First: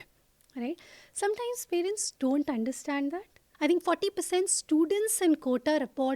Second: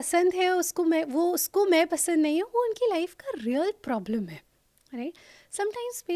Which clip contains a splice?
first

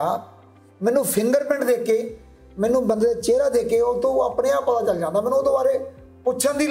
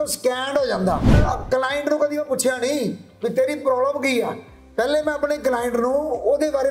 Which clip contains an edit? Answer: second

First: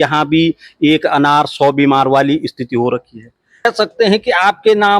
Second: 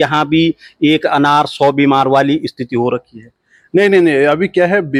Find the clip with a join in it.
first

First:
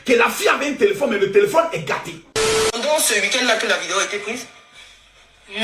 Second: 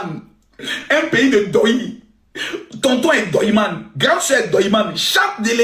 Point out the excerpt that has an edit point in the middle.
first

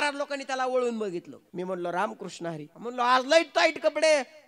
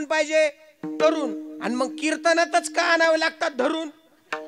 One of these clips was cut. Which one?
first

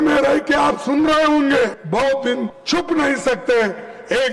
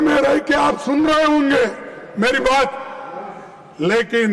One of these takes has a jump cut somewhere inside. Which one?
first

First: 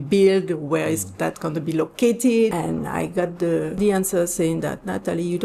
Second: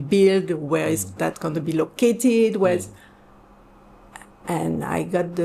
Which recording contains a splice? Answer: first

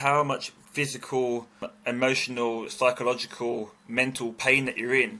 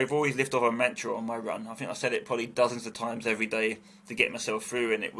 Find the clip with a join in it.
first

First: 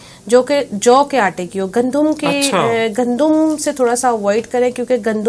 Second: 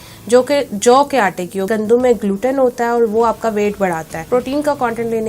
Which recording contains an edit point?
second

